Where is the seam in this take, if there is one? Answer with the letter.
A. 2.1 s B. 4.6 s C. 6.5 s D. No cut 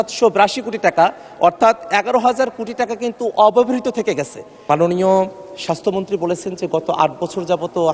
B